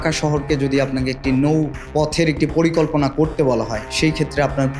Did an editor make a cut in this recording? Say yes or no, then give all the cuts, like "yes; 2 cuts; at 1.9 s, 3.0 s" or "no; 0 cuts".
yes; 1 cut; at 1.8 s